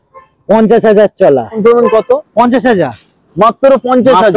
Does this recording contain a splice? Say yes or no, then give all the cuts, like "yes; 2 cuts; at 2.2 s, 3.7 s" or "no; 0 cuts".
yes; 1 cut; at 1.6 s